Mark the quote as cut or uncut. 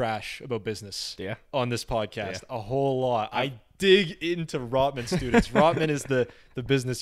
uncut